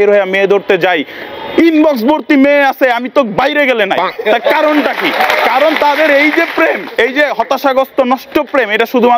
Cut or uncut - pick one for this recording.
uncut